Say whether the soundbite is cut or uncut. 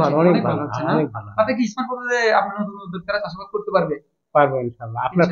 uncut